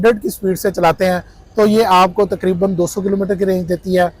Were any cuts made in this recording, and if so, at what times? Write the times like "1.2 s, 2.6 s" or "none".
none